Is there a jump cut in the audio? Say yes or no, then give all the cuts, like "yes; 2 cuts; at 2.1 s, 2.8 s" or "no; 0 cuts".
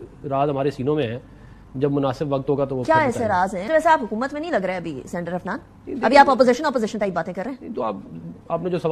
yes; 1 cut; at 3.6 s